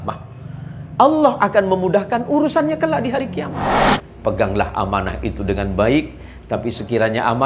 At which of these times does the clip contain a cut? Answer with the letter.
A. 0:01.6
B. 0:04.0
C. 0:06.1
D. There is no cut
B